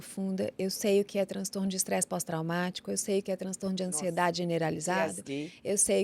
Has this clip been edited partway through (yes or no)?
no